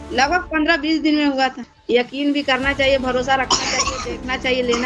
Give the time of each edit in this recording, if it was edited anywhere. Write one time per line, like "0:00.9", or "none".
0:01.7